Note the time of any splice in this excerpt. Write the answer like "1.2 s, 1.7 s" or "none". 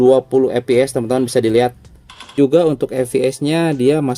2.3 s